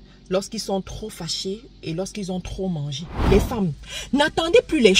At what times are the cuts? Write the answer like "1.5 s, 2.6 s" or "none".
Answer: 3.2 s

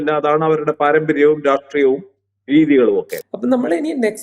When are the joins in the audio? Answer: 3.2 s

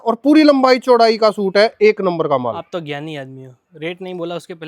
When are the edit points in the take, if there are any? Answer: none

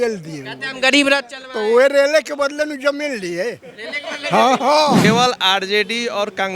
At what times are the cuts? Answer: 5.0 s

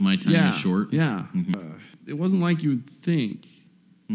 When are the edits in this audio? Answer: 1.5 s

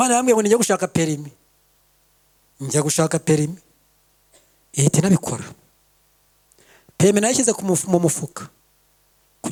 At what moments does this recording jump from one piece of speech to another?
none

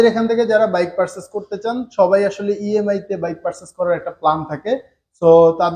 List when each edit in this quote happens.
none

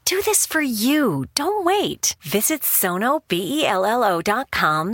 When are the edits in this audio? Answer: none

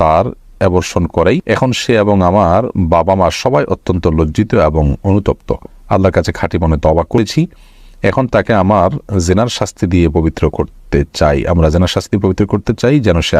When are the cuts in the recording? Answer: 1.4 s, 7.2 s

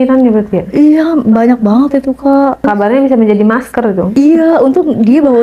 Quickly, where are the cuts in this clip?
2.7 s, 4.1 s

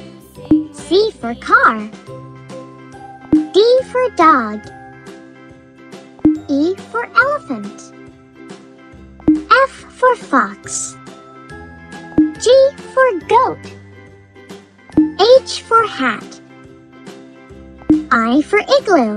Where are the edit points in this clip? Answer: 1.9 s, 3.3 s, 4.8 s, 6.2 s, 7.8 s, 9.2 s

